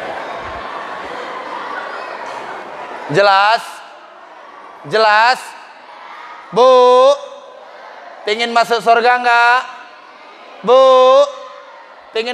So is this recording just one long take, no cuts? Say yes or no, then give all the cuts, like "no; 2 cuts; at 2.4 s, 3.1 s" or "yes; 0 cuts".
yes; 0 cuts